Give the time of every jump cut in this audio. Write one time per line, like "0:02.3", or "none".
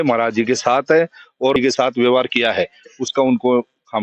0:01.6